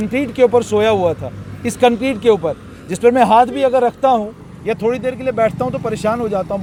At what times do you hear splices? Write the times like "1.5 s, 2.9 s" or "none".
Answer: none